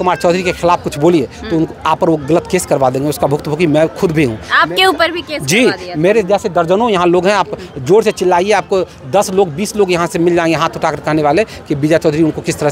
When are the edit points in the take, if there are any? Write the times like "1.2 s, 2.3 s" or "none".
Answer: none